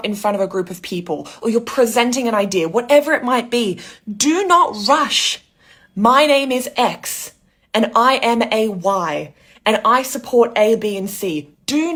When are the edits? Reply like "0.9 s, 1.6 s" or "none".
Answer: none